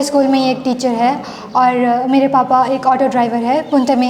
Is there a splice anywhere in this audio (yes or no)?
no